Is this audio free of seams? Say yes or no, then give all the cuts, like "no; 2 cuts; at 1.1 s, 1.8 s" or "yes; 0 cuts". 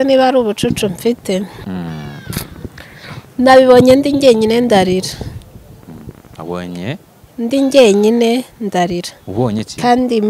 yes; 0 cuts